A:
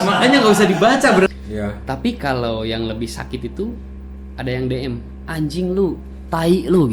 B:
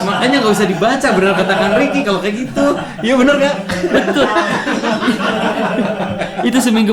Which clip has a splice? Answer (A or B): A